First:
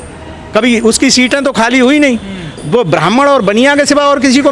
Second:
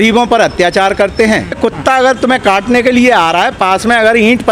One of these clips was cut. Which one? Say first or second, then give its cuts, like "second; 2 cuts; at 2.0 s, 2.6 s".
second; 1 cut; at 1.6 s